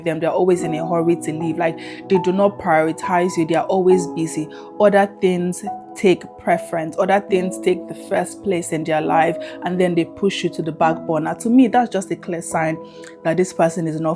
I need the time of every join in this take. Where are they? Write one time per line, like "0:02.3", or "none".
none